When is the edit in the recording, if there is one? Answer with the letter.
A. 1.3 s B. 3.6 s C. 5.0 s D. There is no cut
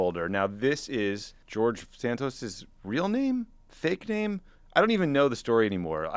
A